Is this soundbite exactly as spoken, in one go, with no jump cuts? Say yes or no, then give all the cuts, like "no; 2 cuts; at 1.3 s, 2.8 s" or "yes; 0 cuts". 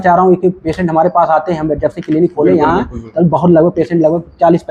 yes; 0 cuts